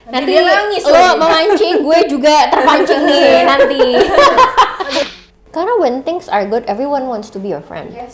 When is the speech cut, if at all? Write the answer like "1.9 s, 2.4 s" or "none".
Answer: 5.1 s